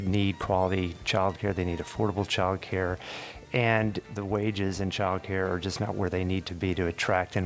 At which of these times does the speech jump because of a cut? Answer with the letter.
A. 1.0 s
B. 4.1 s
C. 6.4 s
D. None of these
B